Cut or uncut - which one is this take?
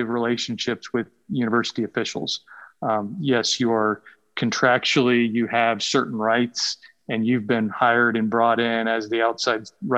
uncut